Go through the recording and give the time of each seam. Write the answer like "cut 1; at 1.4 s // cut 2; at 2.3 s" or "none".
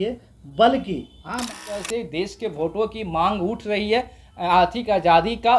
cut 1; at 1.6 s